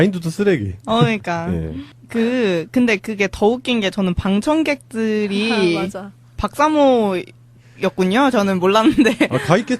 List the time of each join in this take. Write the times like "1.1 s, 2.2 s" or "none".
none